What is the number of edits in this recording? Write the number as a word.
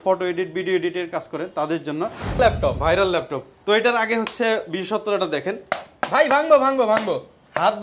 one